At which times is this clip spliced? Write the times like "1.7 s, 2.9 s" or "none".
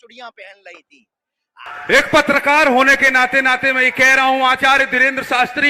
1.7 s